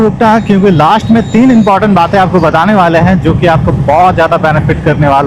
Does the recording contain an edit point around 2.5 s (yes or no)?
no